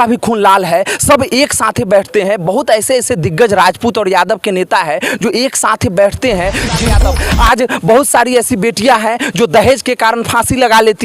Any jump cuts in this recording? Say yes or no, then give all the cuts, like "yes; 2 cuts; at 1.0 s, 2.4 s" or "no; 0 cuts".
yes; 1 cut; at 7.0 s